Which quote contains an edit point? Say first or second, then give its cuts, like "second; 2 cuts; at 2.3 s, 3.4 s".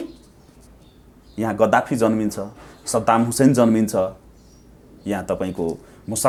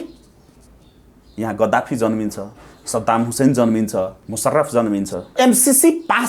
second; 2 cuts; at 4.2 s, 5.3 s